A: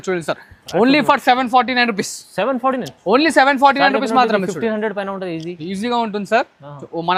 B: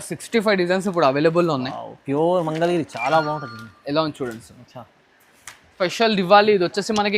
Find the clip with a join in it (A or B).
B